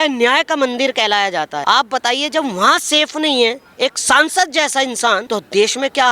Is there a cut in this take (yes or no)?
yes